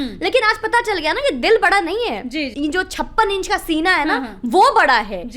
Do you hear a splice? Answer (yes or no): yes